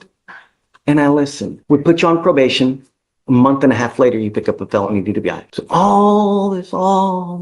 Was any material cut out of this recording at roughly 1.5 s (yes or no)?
yes